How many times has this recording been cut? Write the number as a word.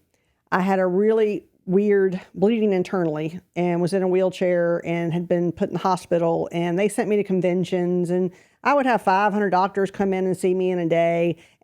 zero